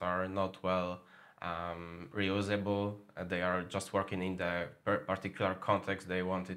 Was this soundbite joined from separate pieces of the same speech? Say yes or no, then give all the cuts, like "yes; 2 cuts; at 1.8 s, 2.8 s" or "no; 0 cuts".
no; 0 cuts